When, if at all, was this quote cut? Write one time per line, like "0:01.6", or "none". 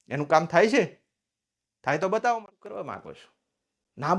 0:02.4